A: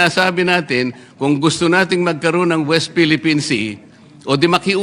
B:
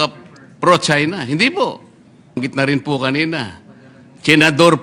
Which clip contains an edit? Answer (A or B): B